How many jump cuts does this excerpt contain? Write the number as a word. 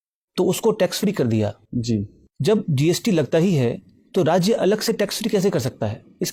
zero